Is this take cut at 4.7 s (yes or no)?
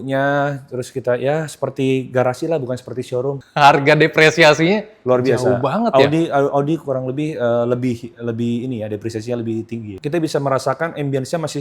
no